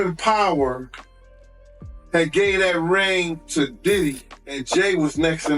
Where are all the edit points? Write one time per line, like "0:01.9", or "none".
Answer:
0:04.7